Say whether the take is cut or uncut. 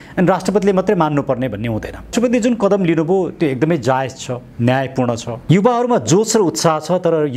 cut